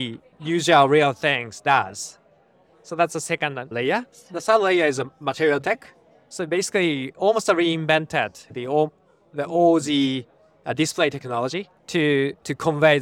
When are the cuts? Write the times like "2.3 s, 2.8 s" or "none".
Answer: 11.8 s